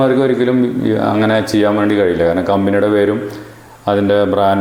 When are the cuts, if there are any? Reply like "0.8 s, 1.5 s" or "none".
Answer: none